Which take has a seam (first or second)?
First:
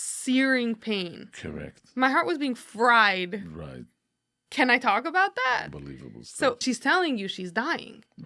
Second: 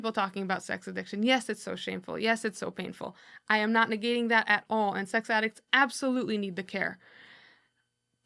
first